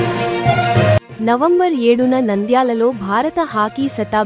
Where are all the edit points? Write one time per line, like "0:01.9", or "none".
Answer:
0:01.1